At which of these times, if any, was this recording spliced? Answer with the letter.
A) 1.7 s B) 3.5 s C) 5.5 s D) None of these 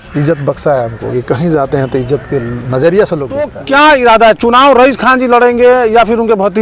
B